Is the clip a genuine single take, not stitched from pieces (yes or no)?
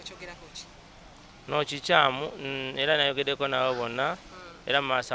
yes